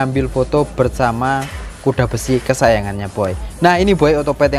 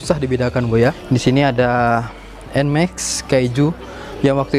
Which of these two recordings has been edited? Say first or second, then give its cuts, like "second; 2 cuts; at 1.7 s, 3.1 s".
second; 1 cut; at 1.0 s